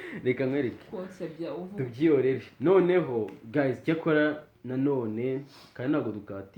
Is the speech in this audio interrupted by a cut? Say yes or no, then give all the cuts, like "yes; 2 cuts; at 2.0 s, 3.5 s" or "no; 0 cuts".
no; 0 cuts